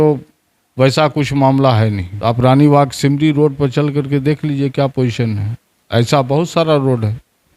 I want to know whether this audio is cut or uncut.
cut